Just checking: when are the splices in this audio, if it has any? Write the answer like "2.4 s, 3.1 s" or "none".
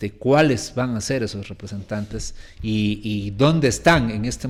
none